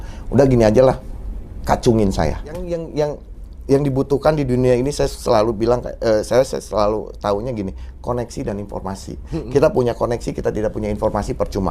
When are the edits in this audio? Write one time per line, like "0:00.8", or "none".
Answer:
0:02.7